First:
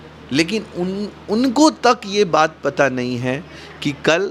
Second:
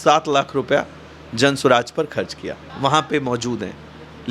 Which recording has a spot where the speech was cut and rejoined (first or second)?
second